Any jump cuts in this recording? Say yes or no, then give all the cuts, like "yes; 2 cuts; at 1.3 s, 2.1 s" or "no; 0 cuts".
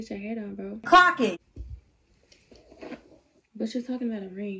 no; 0 cuts